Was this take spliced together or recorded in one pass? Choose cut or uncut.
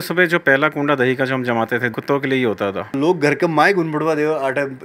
cut